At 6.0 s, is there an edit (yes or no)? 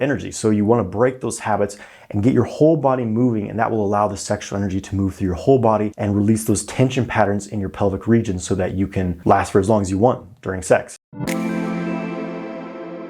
yes